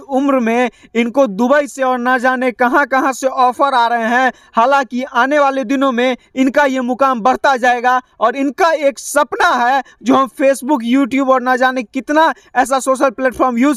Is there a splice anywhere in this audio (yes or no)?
no